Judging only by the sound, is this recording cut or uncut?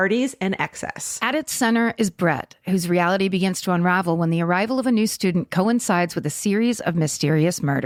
uncut